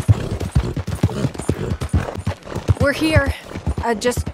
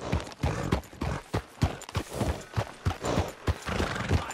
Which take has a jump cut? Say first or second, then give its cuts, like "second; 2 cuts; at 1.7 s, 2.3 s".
first; 1 cut; at 2.2 s